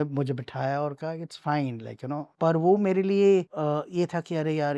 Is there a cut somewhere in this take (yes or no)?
yes